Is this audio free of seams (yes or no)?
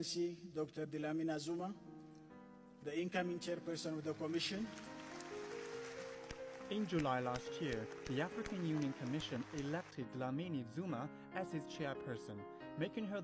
no